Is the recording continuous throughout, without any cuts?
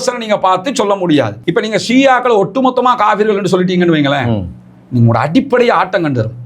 no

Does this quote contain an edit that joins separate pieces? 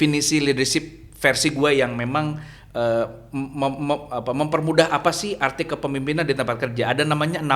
no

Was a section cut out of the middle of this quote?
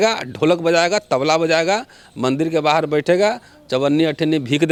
no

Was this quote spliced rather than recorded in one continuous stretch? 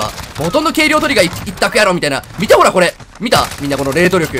no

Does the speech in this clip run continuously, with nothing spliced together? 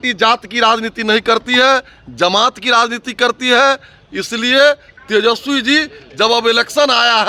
yes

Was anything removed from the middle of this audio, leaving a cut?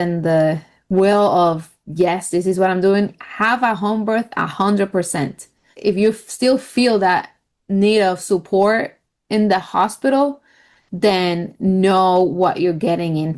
no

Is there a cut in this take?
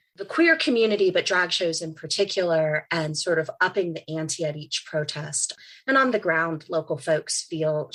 no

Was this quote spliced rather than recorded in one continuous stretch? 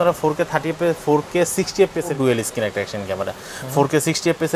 yes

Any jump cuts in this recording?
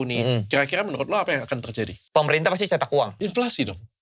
yes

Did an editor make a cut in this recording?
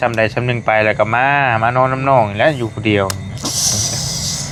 no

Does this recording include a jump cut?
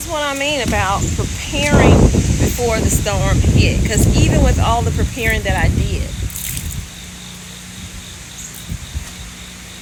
no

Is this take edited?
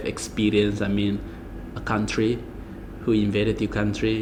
no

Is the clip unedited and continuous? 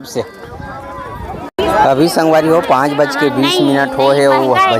no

